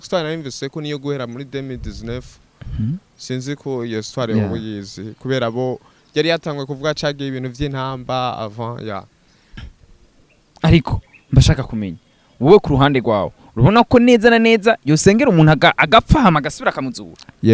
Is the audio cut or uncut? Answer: cut